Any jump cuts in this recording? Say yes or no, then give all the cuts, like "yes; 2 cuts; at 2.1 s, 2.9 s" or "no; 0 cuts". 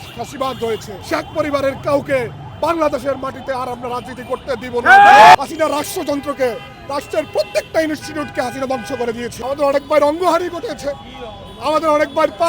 yes; 3 cuts; at 0.9 s, 5.3 s, 9.3 s